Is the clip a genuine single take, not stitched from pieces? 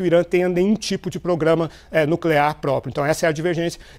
yes; 0 cuts

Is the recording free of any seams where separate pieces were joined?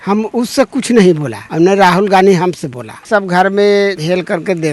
no; 2 cuts; at 1.4 s, 3.1 s

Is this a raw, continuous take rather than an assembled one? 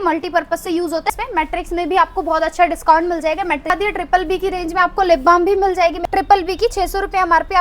no; 3 cuts; at 1.1 s, 3.7 s, 6.0 s

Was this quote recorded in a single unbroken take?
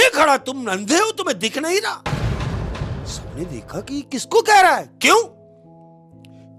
yes; 0 cuts

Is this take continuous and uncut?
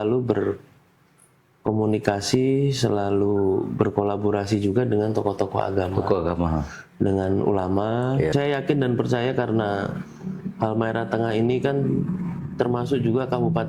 no; 1 cut; at 8.3 s

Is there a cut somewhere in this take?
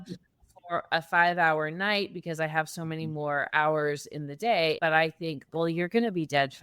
yes; 1 cut; at 4.8 s

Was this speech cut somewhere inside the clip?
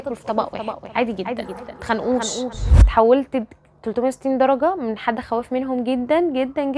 yes; 1 cut; at 2.5 s

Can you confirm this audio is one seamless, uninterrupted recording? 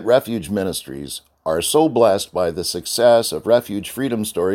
yes; 0 cuts

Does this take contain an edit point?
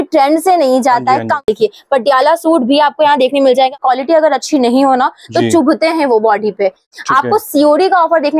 yes; 3 cuts; at 1.4 s, 3.7 s, 6.9 s

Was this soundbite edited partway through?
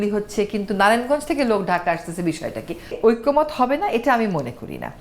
yes; 1 cut; at 2.9 s

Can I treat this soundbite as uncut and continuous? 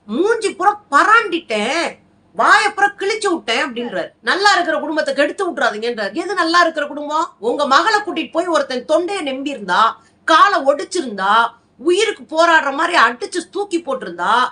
no; 2 cuts; at 4.1 s, 7.3 s

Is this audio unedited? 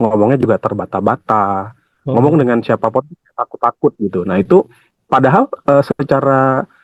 yes; 0 cuts

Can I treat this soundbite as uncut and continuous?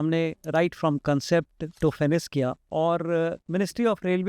no; 3 cuts; at 1.6 s, 2.6 s, 3.4 s

